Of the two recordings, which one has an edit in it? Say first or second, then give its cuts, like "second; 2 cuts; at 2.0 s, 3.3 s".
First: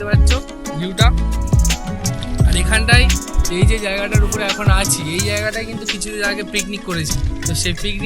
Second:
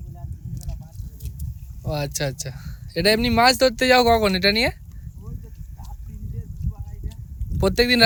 first; 1 cut; at 7.1 s